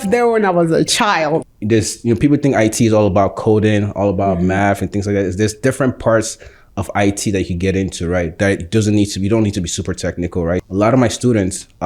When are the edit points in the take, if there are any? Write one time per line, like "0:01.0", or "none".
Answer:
0:01.4
0:10.6

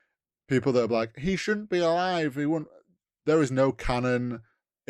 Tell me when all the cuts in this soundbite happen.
none

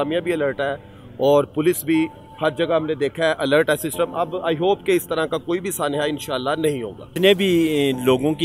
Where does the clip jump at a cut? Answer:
0:07.1

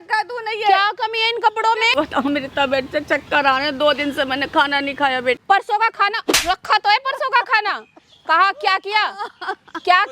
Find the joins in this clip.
0:01.9
0:05.4

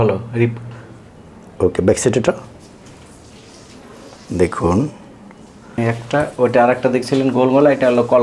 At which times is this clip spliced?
0:05.8

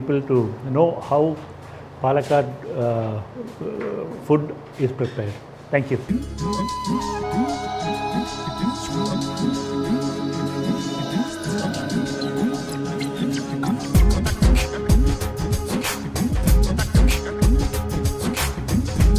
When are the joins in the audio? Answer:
none

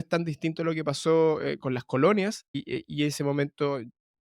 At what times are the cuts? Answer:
0:02.5

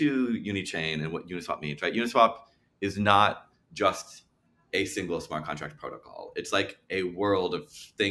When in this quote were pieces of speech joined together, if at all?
none

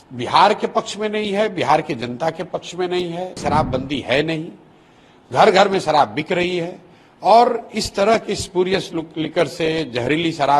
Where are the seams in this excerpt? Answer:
0:03.4

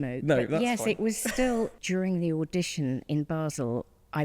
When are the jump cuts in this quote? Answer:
0:01.8

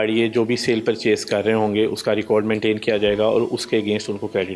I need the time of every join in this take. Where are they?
none

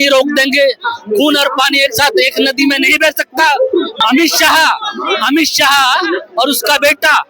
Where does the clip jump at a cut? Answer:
0:04.0

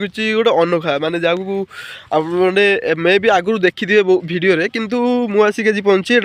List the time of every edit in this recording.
none

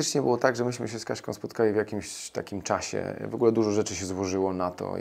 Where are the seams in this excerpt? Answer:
none

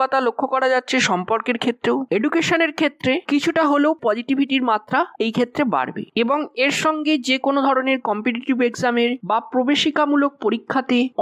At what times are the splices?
0:02.0

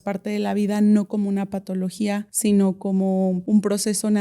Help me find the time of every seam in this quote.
0:02.3
0:03.4

